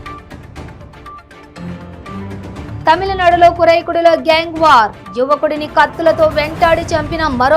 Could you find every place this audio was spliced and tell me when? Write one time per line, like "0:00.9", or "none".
0:02.2